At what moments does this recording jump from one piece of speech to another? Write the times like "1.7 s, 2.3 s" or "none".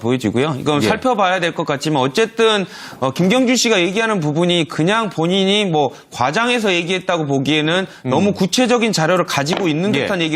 none